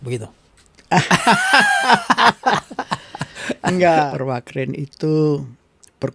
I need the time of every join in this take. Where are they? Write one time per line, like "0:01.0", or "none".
0:04.1